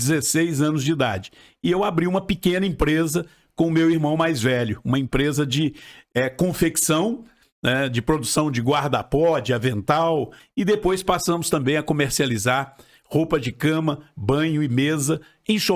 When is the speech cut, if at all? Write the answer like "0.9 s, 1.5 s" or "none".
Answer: 10.4 s